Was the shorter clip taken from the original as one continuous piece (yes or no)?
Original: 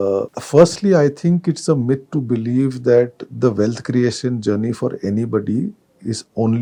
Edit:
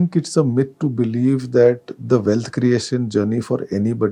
yes